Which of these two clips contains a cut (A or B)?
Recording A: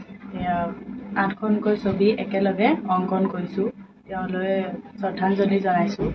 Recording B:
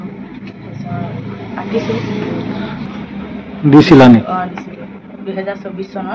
B